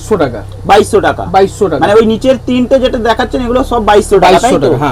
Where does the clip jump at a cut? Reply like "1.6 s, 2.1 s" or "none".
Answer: none